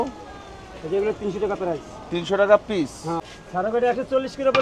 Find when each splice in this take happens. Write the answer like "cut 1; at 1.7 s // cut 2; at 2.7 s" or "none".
cut 1; at 3.2 s